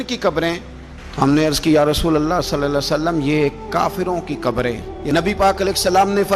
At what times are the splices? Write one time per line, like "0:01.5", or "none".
0:04.9